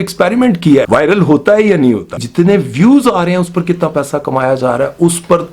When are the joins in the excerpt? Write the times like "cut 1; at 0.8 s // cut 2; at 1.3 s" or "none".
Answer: cut 1; at 0.9 s // cut 2; at 2.2 s